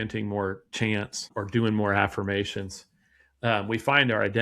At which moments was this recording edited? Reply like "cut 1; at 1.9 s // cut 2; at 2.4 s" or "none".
cut 1; at 1.3 s